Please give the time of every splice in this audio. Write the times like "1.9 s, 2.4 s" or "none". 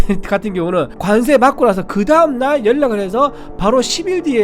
1.0 s